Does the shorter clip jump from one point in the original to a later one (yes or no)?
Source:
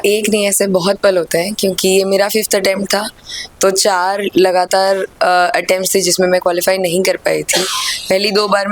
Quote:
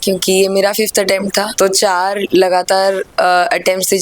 yes